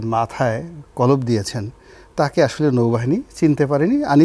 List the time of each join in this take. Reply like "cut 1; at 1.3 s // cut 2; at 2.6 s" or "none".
none